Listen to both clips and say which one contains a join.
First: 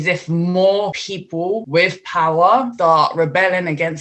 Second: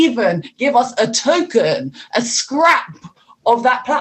first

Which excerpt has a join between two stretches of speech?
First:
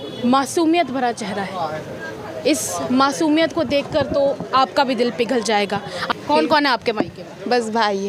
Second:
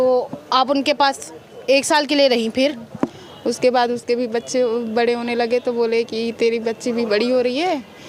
first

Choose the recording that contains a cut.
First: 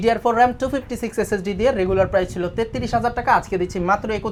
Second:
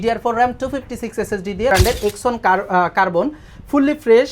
second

